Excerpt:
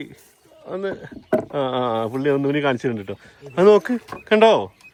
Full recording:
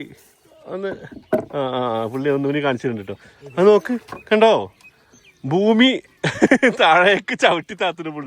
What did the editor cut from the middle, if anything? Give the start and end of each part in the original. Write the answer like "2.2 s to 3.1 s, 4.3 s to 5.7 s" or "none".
none